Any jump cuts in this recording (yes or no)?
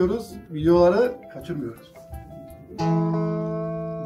no